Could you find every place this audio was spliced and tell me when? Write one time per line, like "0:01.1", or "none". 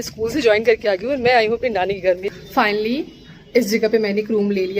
0:02.2